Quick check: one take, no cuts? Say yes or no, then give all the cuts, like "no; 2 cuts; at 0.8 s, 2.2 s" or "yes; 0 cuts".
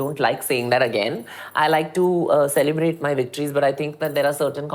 yes; 0 cuts